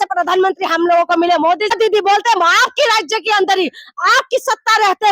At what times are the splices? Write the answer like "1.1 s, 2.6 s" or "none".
1.7 s